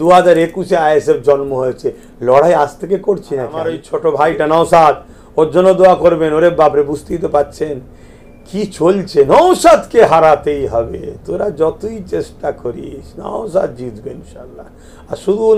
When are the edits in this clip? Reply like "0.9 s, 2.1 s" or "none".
3.8 s